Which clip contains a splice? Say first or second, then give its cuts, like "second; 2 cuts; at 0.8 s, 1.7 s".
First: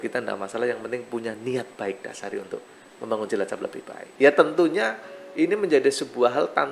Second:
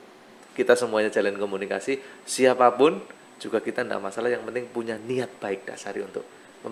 first; 1 cut; at 4.0 s